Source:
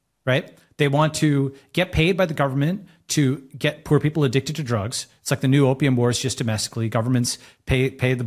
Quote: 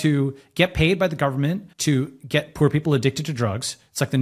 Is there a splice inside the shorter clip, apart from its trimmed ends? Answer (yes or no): yes